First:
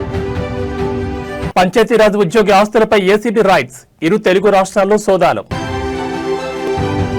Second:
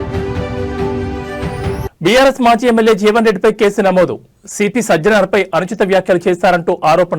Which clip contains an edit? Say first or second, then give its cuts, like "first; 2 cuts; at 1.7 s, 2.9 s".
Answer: second; 1 cut; at 1.5 s